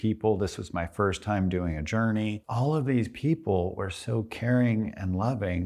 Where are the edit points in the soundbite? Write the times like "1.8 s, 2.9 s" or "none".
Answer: 2.4 s